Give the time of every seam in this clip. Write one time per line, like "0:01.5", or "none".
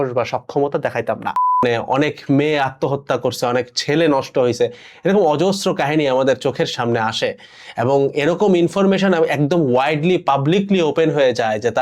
0:01.6